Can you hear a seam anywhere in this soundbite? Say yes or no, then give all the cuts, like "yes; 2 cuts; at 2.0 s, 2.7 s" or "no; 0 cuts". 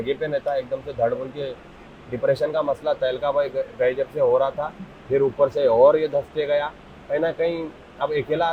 no; 0 cuts